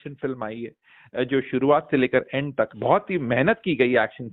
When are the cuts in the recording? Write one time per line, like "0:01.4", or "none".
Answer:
0:02.7